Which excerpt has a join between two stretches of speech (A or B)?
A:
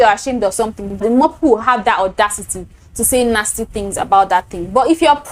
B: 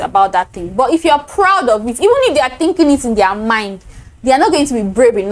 A